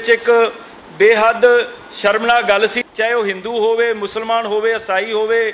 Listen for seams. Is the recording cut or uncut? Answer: cut